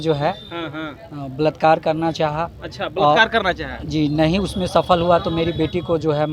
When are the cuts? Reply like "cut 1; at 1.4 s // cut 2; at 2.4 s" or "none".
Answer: none